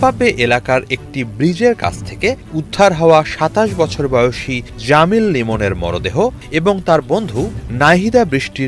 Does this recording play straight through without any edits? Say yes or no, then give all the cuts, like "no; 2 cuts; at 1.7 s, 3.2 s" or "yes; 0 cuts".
yes; 0 cuts